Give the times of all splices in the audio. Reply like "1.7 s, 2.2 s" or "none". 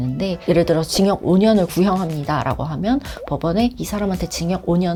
none

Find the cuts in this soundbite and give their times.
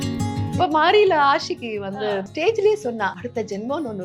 2.3 s, 3.2 s

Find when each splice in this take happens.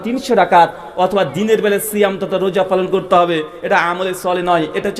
none

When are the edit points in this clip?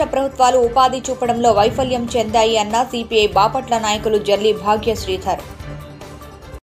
none

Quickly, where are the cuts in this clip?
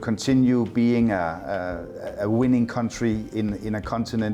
none

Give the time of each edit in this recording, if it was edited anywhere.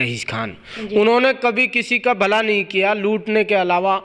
none

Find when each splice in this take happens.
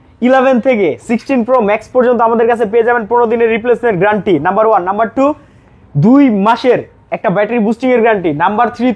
none

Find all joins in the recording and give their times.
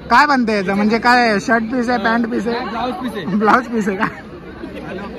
none

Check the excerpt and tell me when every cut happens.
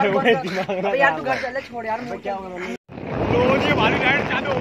2.8 s

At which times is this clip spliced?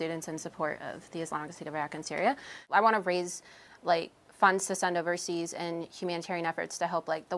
2.6 s

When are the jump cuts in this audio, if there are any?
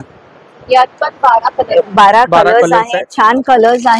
none

